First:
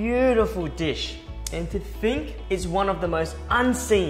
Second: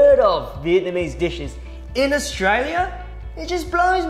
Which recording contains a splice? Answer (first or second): first